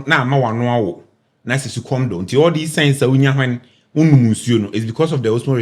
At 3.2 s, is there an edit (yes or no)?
no